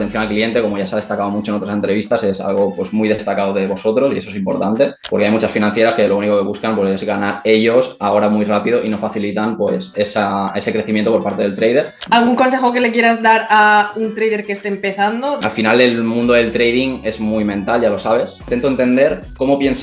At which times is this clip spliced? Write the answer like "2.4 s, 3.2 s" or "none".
5.0 s, 12.0 s, 15.4 s, 18.5 s